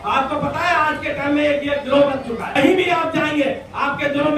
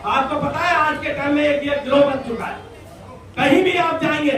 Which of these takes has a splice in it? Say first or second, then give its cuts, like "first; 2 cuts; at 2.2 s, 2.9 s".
first; 1 cut; at 2.5 s